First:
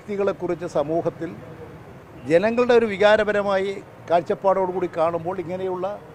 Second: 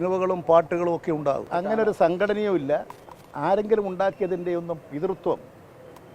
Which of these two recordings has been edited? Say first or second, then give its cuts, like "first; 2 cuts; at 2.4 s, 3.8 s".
second; 1 cut; at 1.5 s